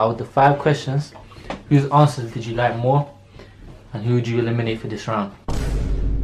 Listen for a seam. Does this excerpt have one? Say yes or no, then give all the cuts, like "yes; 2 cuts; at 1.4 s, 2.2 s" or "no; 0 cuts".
no; 0 cuts